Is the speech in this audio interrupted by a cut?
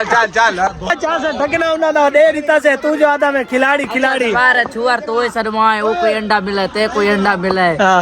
yes; 1 cut; at 0.9 s

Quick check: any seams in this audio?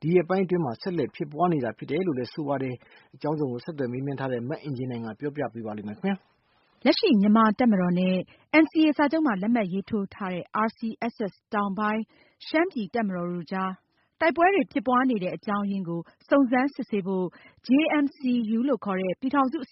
yes; 1 cut; at 2.3 s

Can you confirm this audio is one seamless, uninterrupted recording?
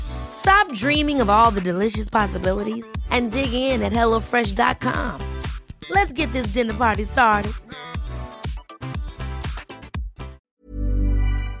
no; 1 cut; at 10.5 s

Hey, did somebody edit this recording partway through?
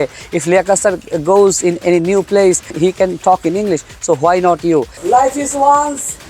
yes; 1 cut; at 4.9 s

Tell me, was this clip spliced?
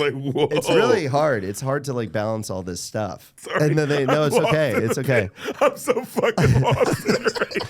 yes; 1 cut; at 3.2 s

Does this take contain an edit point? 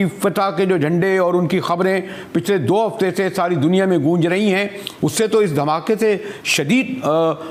no; 0 cuts

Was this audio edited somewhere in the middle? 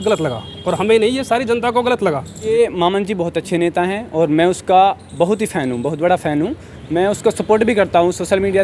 yes; 1 cut; at 2.4 s

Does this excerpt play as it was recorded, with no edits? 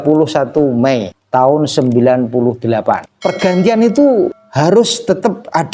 no; 3 cuts; at 1.2 s, 3.1 s, 4.4 s

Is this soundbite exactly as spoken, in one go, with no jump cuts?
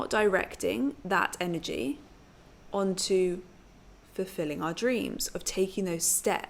yes; 0 cuts

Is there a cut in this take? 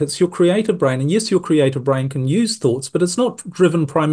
no; 0 cuts

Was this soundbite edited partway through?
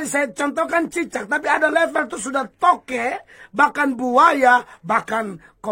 no; 0 cuts

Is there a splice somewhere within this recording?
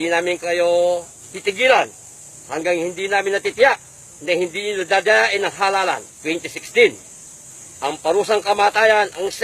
yes; 1 cut; at 2.5 s

